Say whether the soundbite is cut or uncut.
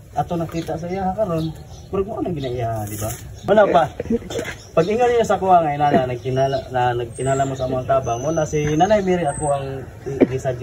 uncut